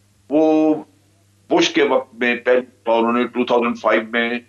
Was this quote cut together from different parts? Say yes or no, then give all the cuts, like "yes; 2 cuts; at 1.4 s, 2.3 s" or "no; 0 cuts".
no; 0 cuts